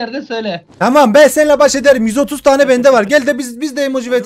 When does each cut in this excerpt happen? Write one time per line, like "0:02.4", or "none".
none